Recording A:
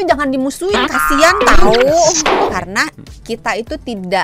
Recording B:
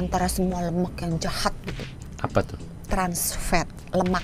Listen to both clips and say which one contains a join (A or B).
A